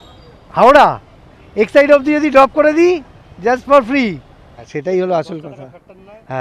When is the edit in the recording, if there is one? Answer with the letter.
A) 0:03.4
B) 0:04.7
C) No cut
B